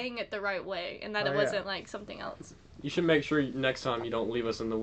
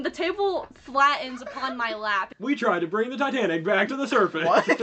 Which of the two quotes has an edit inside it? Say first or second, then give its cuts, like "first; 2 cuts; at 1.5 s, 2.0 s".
second; 1 cut; at 2.3 s